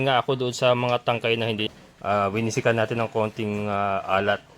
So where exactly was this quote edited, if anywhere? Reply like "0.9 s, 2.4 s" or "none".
1.6 s

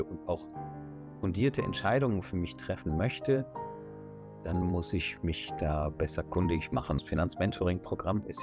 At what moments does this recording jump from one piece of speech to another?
7.0 s

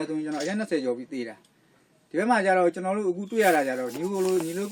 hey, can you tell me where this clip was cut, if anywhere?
none

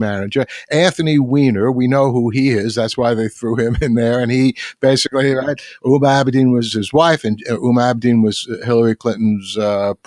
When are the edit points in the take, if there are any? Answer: 6.7 s

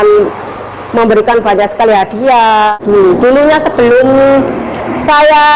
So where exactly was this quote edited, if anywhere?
2.7 s

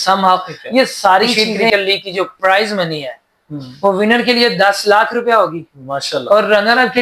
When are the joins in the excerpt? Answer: 1.5 s

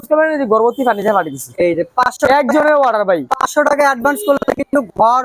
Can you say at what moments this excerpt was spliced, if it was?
none

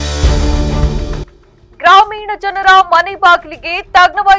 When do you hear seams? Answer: 1.3 s

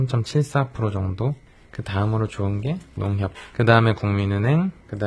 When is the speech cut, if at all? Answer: none

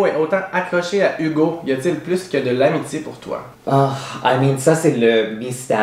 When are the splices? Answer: none

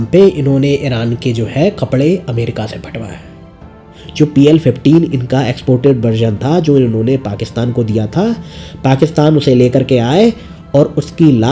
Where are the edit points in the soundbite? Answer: 4.0 s

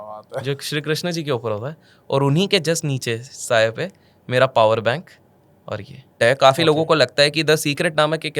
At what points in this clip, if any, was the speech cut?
6.1 s

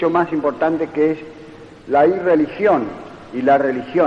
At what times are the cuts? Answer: none

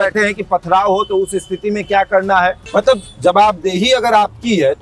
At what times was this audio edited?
2.6 s

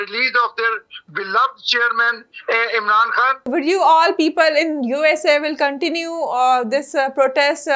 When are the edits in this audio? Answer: 3.5 s

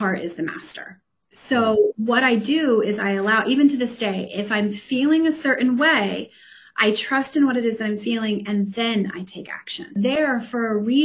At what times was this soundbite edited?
10.0 s

